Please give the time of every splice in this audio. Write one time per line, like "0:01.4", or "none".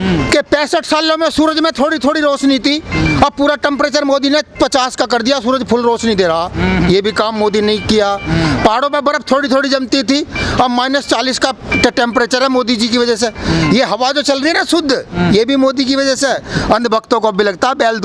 none